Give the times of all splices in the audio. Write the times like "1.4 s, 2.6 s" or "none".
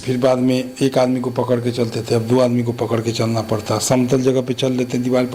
none